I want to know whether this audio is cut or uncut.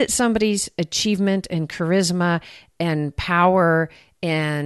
uncut